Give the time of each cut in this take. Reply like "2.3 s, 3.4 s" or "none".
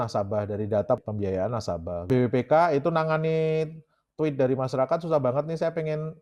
none